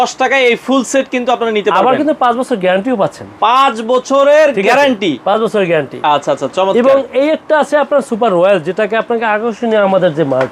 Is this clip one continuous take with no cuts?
yes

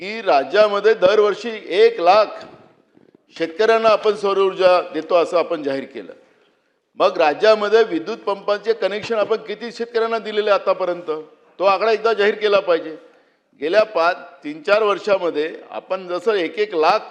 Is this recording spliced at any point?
no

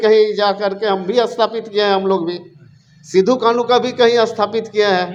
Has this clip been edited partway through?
no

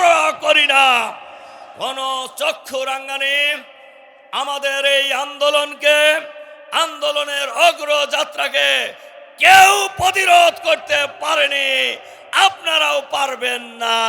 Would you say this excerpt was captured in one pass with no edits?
yes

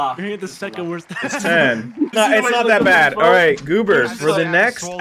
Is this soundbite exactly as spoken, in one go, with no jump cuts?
no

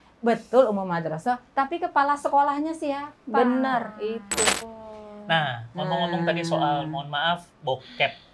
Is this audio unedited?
no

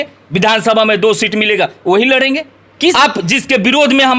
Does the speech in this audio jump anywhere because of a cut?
yes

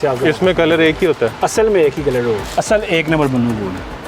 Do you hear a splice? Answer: yes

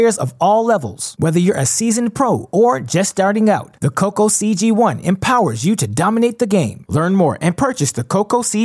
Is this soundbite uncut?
yes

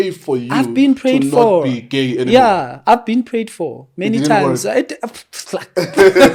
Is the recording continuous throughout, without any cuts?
yes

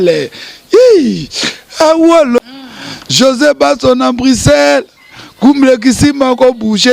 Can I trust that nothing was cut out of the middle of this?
no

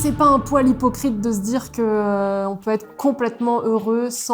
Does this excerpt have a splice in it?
no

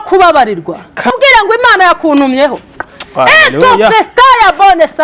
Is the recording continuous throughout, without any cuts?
no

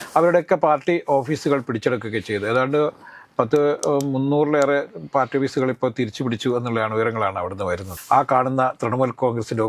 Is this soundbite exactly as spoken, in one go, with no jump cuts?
no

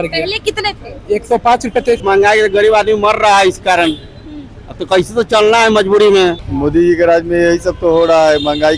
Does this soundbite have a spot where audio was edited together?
yes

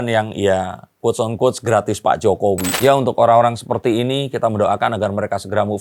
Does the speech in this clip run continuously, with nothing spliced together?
no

